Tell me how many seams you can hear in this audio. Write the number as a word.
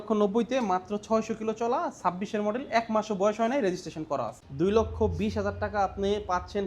one